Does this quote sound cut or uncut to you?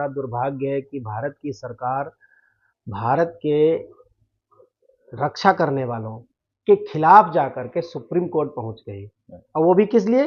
uncut